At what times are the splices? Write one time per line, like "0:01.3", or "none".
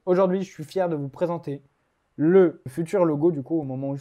0:02.7